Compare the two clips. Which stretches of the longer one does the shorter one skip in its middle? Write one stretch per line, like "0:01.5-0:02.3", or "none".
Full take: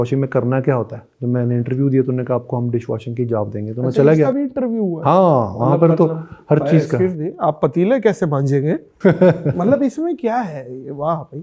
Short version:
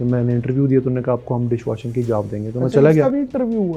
none

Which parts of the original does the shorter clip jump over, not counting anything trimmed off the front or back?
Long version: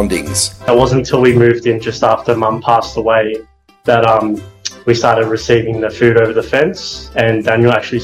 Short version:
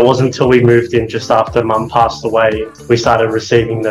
0:03.4-0:04.7

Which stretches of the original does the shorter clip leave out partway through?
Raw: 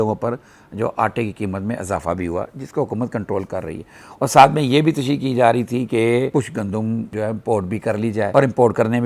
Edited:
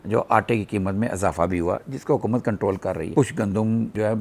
0:03.8-0:06.3

